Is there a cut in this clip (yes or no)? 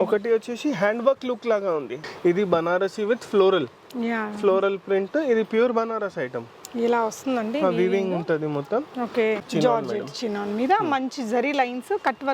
yes